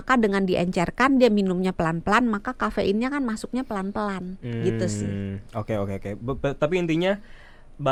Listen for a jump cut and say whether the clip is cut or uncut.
uncut